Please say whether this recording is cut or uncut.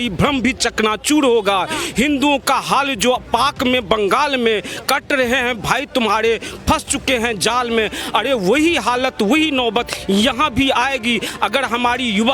uncut